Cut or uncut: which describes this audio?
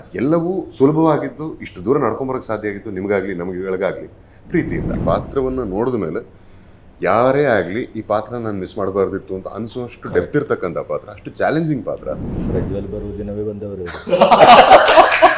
cut